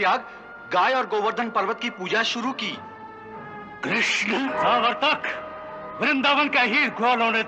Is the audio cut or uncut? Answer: cut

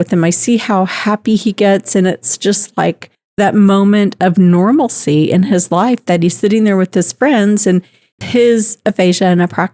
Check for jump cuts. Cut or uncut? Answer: cut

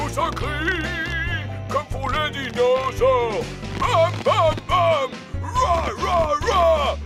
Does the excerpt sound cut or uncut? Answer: uncut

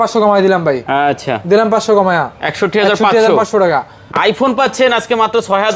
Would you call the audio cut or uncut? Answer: cut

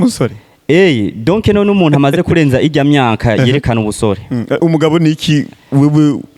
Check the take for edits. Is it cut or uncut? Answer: uncut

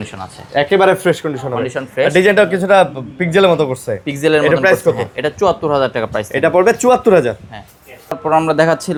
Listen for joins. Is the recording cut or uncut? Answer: uncut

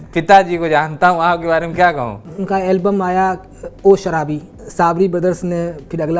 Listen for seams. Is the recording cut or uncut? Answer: cut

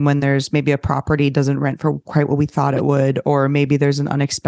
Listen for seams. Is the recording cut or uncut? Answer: uncut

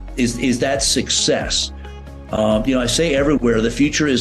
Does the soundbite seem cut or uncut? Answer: uncut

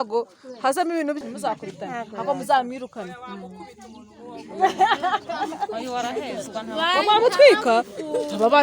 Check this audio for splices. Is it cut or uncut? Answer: cut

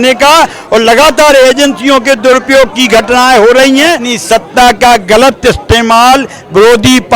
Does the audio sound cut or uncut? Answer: cut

